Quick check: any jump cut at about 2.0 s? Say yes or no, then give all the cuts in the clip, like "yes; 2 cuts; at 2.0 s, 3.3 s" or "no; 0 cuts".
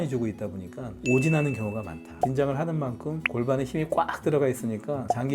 yes; 1 cut; at 2.0 s